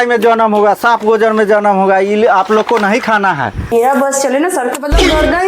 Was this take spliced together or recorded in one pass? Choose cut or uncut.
cut